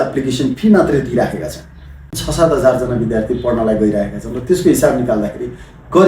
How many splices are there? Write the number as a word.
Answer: one